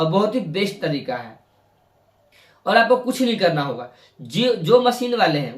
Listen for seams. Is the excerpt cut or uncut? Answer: uncut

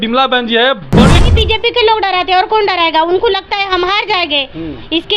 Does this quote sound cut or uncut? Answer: cut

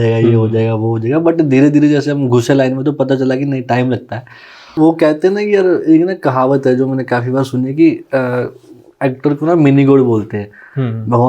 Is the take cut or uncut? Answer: cut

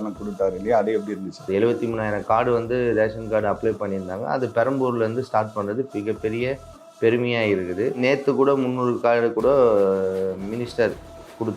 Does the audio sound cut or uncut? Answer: cut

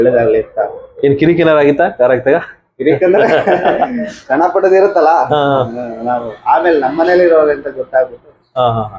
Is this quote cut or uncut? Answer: uncut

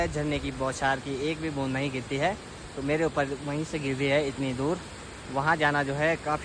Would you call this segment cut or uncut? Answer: uncut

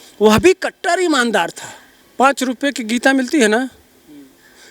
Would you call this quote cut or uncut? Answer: cut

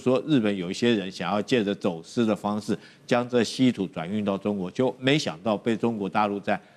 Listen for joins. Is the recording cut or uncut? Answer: uncut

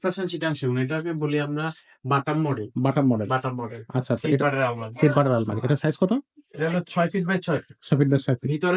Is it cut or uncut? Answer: uncut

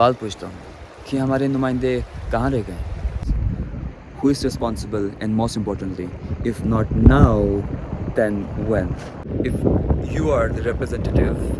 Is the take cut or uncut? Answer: cut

